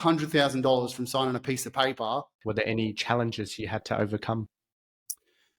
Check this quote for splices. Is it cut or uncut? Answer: cut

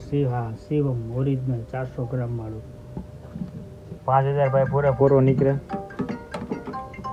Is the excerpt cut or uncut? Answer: uncut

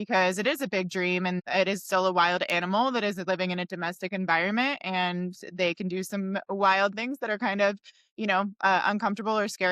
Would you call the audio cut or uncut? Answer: cut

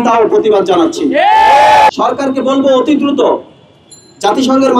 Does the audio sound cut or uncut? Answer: cut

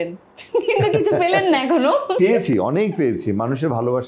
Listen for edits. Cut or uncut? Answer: uncut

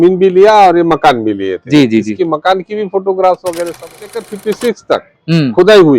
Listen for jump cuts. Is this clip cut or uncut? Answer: cut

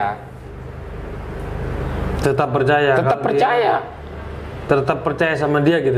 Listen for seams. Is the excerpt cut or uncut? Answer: uncut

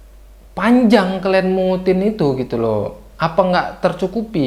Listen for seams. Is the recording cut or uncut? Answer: uncut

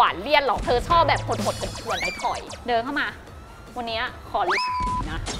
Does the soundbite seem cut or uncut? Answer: cut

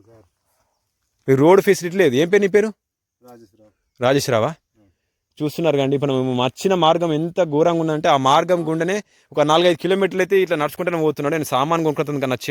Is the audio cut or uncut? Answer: uncut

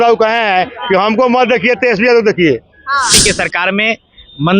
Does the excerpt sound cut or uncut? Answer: cut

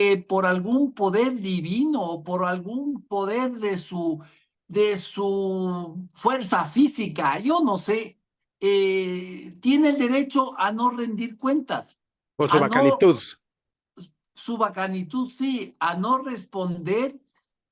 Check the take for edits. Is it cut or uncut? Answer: uncut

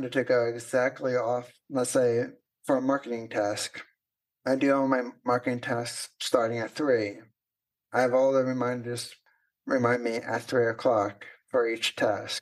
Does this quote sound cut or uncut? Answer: cut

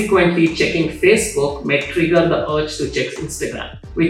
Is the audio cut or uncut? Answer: uncut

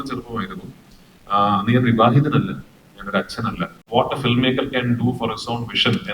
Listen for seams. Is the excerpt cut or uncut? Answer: cut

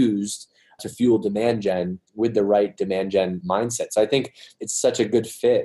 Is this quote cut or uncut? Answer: cut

